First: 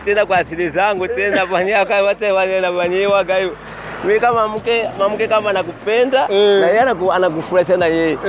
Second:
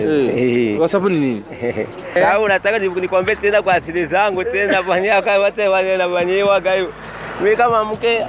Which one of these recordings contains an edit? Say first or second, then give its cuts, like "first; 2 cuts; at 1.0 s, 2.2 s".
second; 1 cut; at 2.2 s